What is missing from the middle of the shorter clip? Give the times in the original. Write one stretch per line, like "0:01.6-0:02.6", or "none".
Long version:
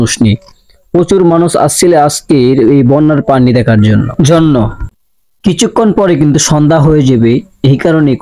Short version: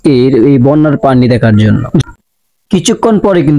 0:04.3-0:04.7